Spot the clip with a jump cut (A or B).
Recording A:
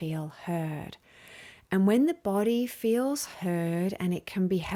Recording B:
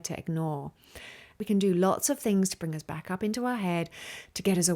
B